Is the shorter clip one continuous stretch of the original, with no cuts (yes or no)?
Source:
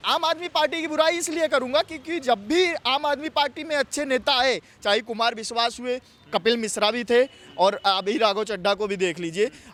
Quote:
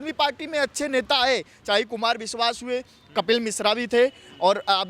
yes